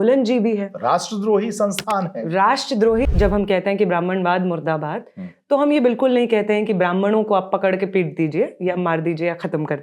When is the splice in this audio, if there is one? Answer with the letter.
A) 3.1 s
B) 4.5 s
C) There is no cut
A